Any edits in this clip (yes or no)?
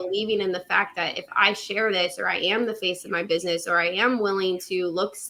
no